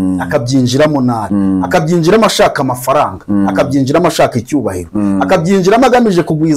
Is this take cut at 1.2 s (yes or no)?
yes